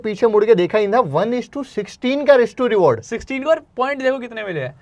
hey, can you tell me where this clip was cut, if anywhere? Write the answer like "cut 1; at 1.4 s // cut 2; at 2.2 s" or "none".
none